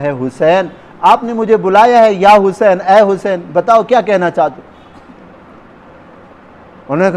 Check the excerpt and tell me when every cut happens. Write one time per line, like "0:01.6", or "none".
none